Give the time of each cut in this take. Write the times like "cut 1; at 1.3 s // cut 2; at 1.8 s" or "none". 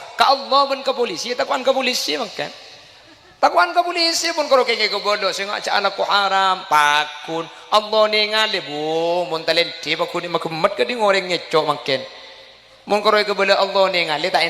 none